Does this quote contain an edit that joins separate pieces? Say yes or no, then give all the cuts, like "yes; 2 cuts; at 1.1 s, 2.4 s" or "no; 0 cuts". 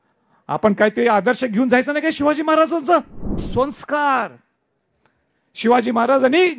yes; 1 cut; at 3.5 s